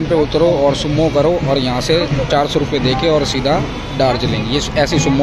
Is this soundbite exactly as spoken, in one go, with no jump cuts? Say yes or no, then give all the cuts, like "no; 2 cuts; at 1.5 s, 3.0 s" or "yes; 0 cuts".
yes; 0 cuts